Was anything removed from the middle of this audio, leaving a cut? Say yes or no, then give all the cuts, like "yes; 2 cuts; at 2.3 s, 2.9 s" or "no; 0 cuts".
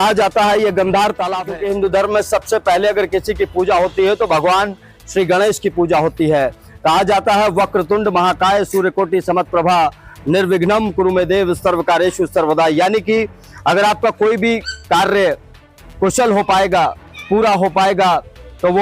yes; 1 cut; at 1.5 s